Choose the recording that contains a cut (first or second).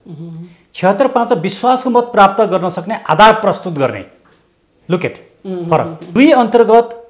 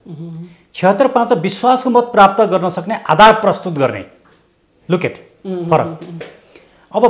first